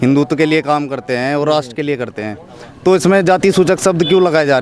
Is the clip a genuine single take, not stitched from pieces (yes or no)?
yes